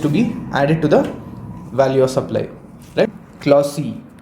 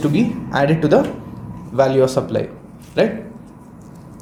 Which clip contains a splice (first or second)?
first